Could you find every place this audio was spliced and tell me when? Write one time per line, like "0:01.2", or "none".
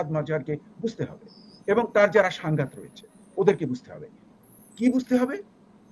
none